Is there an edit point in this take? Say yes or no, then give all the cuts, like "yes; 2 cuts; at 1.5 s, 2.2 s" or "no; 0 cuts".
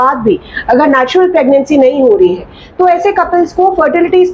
no; 0 cuts